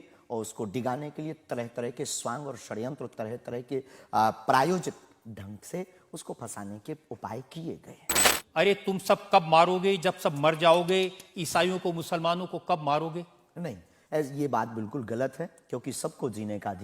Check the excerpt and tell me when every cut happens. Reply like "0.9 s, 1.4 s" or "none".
8.4 s